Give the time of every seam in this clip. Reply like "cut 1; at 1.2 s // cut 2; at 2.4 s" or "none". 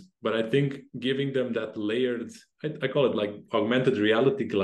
cut 1; at 3.4 s